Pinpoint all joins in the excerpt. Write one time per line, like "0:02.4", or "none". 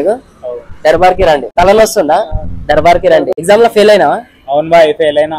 0:01.5
0:03.4